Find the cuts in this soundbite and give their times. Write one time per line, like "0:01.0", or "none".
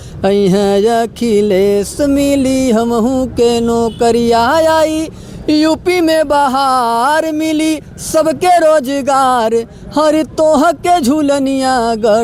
none